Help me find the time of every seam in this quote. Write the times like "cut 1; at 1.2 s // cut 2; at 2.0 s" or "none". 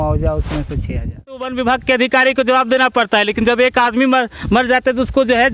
cut 1; at 1.4 s